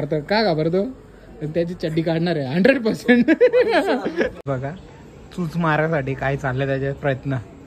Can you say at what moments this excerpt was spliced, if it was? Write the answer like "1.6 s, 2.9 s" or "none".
4.3 s